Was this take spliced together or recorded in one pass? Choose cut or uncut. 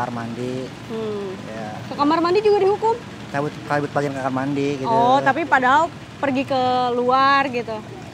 uncut